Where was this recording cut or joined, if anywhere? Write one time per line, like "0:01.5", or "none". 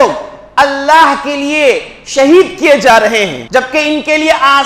0:03.4